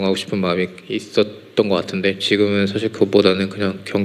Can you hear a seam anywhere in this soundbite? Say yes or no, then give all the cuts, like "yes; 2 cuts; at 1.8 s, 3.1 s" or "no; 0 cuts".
no; 0 cuts